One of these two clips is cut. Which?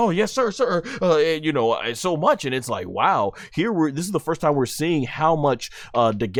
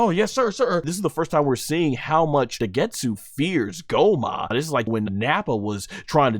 second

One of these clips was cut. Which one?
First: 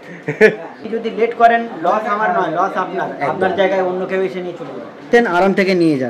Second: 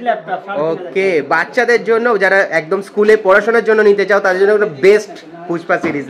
first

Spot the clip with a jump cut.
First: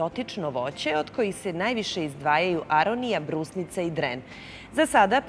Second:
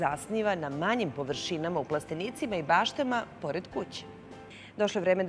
first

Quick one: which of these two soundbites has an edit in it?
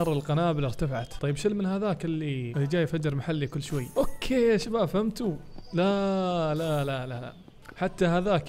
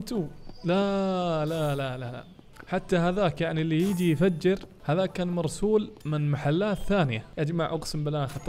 first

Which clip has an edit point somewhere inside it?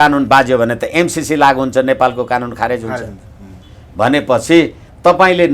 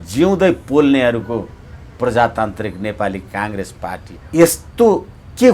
second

